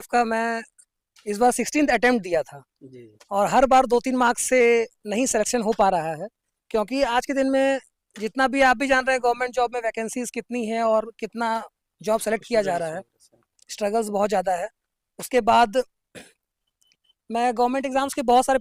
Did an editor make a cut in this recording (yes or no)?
no